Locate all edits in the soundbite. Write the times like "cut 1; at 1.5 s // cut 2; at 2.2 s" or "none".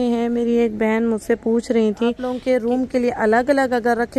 cut 1; at 2.4 s

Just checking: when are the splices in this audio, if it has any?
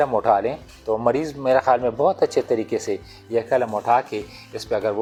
none

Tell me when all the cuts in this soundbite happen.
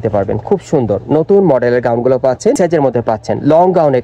cut 1; at 2.6 s

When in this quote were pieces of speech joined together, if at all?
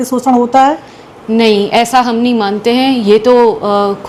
none

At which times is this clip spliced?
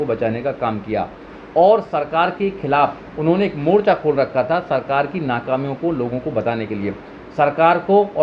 none

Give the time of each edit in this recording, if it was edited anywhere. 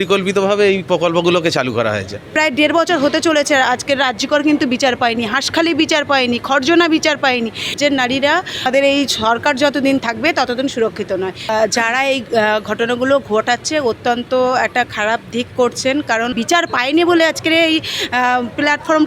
cut 1; at 2.3 s // cut 2; at 7.7 s // cut 3; at 8.7 s // cut 4; at 11.5 s // cut 5; at 16.4 s

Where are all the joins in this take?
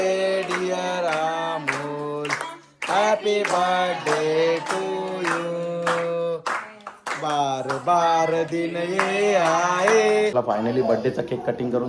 cut 1; at 10.3 s

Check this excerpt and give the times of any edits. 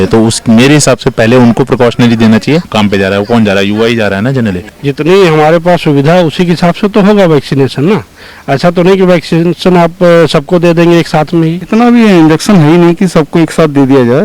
cut 1; at 2.7 s // cut 2; at 4.7 s // cut 3; at 11.6 s

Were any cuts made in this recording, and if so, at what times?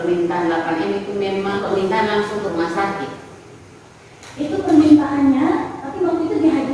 cut 1; at 1.6 s

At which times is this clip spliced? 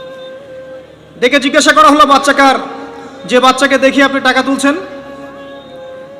cut 1; at 1.1 s

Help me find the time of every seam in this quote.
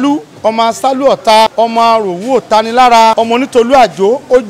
cut 1; at 1.5 s // cut 2; at 3.1 s

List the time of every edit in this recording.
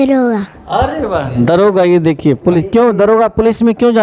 none

